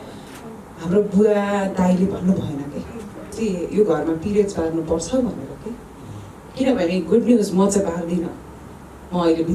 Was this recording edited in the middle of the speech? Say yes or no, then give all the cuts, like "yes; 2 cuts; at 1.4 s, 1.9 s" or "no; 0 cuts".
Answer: yes; 1 cut; at 3.4 s